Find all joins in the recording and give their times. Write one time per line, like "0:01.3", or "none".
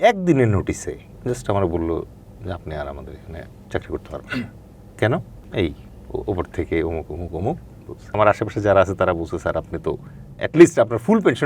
0:01.1
0:03.5
0:05.4
0:08.1